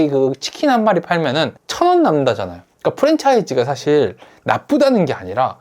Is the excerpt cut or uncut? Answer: cut